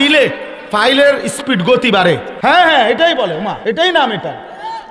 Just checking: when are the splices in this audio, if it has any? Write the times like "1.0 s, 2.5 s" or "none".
2.3 s, 3.6 s